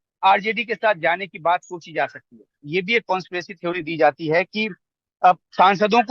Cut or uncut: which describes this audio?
cut